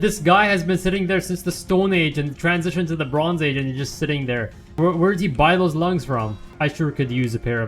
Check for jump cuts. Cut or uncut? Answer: cut